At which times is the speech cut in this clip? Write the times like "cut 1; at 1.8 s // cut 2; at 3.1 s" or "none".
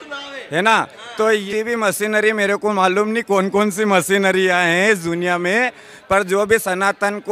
cut 1; at 1.4 s

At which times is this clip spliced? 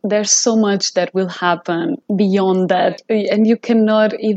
cut 1; at 2.0 s // cut 2; at 3.0 s

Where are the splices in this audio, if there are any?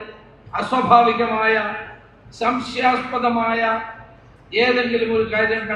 none

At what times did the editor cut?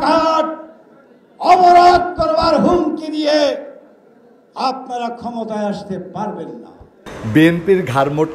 cut 1; at 7.1 s

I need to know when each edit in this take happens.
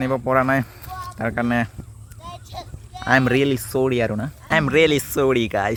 none

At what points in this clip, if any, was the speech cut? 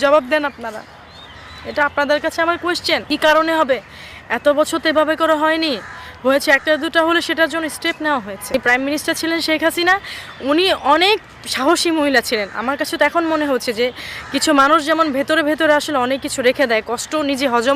cut 1; at 3.0 s // cut 2; at 8.5 s

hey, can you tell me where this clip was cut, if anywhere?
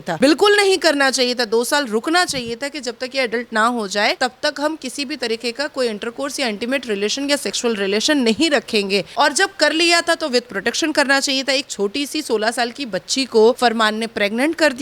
cut 1; at 13.6 s

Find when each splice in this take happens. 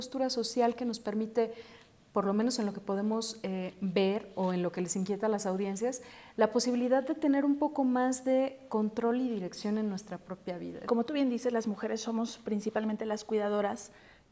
cut 1; at 10.8 s

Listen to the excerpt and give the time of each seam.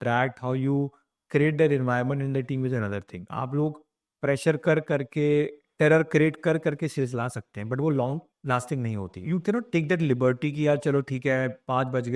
cut 1; at 9.1 s

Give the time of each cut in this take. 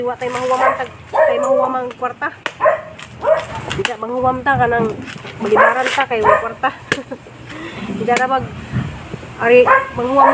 cut 1; at 3.6 s

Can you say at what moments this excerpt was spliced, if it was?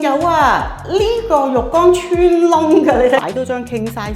cut 1; at 3.2 s

